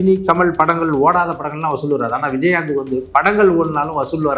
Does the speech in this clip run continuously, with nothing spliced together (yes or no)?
yes